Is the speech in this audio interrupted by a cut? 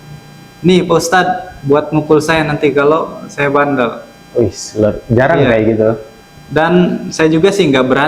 no; 0 cuts

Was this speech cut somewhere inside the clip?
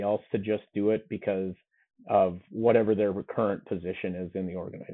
no; 0 cuts

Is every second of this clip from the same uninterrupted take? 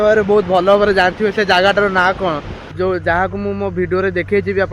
no; 1 cut; at 2.7 s

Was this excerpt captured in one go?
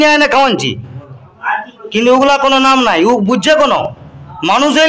yes; 0 cuts

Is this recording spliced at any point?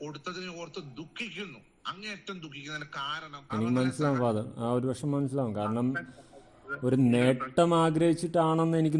yes; 1 cut; at 3.5 s

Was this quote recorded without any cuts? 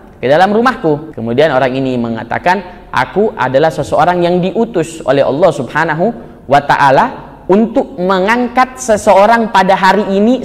no; 1 cut; at 1.1 s

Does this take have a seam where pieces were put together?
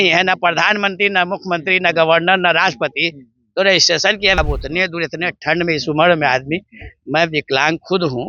yes; 1 cut; at 4.4 s

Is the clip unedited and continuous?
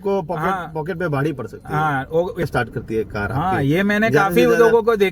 no; 1 cut; at 2.4 s

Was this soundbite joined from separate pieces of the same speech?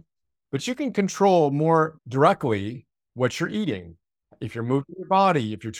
yes; 1 cut; at 2.0 s

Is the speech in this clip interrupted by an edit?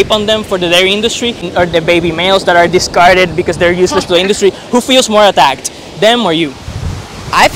yes; 1 cut; at 1.4 s

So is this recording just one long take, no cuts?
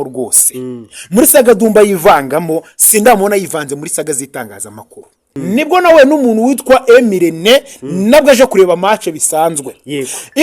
no; 1 cut; at 5.2 s

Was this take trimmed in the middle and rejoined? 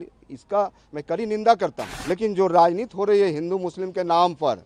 yes; 1 cut; at 1.9 s

